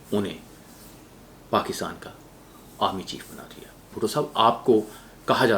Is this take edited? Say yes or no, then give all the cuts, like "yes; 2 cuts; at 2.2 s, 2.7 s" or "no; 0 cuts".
yes; 1 cut; at 3.9 s